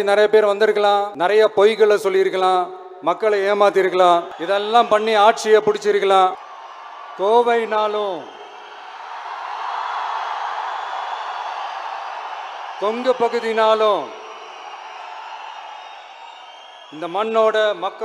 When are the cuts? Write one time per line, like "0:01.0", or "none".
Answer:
0:01.1
0:04.3
0:06.4